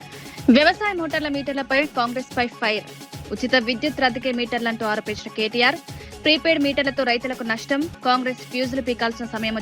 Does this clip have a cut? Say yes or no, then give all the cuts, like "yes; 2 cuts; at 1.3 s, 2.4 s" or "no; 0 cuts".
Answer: no; 0 cuts